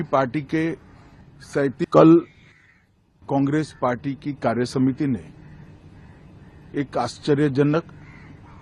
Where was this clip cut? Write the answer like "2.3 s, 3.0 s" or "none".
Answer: 1.8 s